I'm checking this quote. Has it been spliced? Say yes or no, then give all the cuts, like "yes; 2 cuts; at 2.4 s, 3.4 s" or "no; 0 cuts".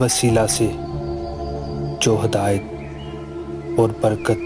no; 0 cuts